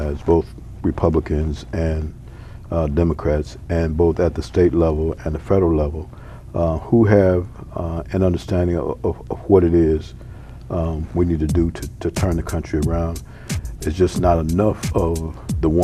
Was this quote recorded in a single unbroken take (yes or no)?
yes